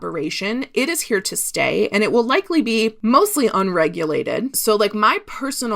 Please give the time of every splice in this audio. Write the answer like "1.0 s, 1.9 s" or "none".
3.0 s, 4.6 s